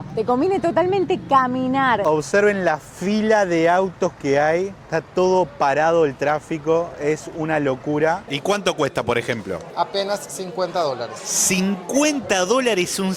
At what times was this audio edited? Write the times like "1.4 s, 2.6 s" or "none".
2.0 s, 8.3 s